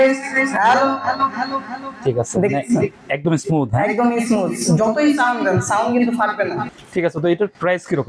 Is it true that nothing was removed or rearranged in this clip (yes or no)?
no